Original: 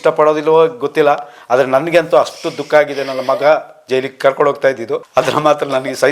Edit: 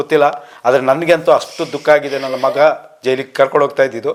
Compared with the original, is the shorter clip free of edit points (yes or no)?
yes